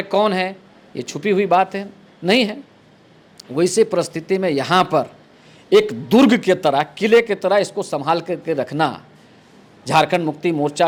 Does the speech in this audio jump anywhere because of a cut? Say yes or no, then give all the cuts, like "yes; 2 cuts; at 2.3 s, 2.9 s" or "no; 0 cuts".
no; 0 cuts